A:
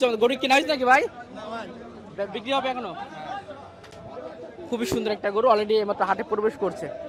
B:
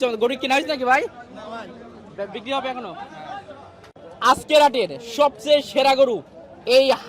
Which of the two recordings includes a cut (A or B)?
B